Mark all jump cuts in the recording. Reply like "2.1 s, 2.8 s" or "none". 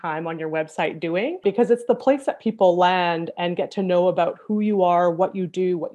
none

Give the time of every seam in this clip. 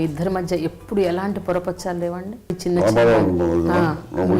2.5 s

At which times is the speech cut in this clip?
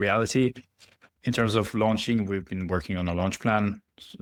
none

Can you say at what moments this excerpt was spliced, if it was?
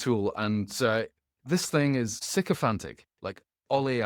2.2 s

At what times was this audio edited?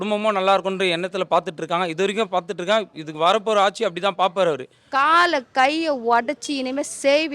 4.7 s

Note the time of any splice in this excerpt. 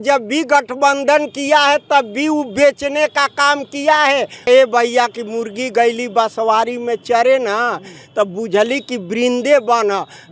4.5 s

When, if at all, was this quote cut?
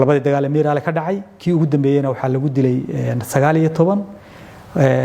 none

